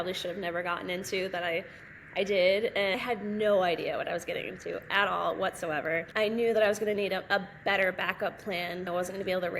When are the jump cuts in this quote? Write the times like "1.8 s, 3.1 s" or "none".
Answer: 3.0 s, 6.1 s, 8.9 s